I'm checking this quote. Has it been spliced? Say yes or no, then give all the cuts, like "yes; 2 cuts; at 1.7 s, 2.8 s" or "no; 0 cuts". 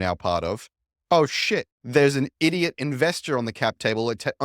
yes; 1 cut; at 1.8 s